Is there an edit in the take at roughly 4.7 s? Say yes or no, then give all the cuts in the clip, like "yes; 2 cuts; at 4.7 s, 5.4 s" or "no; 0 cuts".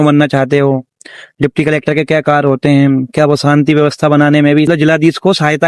yes; 1 cut; at 4.7 s